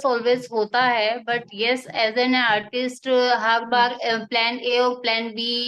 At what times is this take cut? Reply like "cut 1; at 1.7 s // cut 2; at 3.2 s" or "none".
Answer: none